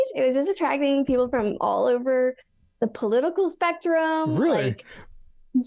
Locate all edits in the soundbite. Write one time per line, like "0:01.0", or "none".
none